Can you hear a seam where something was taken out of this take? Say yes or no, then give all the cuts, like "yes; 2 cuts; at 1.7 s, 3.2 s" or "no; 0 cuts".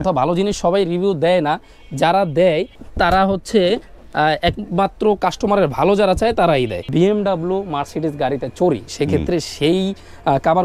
yes; 2 cuts; at 2.7 s, 6.9 s